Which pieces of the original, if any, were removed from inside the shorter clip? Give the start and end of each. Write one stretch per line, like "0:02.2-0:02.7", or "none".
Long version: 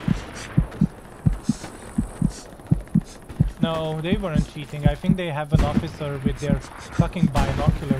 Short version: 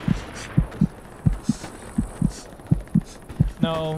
none